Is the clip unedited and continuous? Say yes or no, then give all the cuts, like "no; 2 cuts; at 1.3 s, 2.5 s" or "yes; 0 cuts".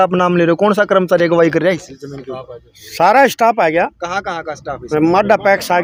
yes; 0 cuts